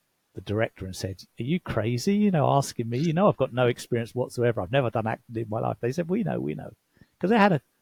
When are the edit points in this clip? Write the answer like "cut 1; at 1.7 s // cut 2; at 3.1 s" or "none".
none